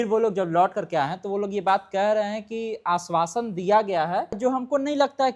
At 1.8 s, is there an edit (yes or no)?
no